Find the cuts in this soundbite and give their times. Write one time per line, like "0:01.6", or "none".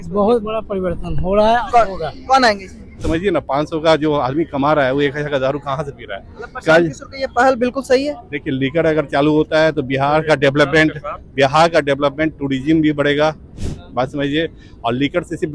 0:03.0